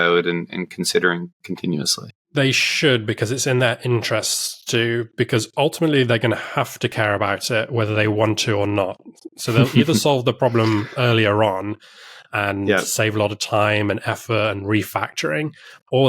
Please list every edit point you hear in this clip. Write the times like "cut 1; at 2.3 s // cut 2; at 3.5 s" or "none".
cut 1; at 2.3 s